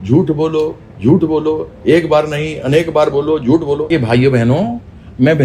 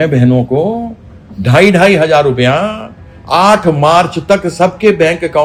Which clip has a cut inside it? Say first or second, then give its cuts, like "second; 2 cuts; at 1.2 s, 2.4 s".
first; 1 cut; at 3.9 s